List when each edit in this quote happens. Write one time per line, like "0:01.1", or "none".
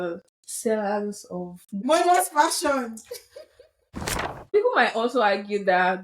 0:01.8
0:03.8